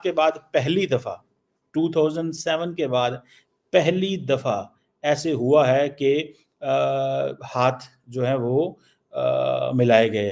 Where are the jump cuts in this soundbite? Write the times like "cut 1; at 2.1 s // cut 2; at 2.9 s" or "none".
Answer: none